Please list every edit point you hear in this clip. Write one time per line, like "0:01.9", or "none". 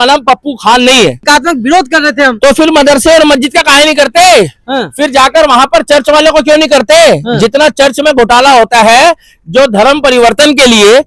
none